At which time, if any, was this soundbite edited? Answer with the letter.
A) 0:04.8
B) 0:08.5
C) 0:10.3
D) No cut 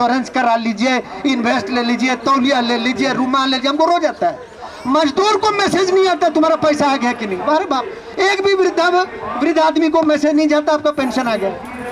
D